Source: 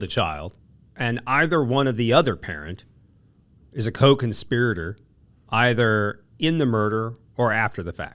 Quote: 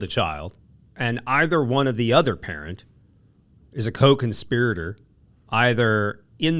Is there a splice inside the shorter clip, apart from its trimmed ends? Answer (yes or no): no